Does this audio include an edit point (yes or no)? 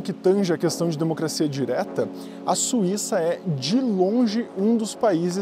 no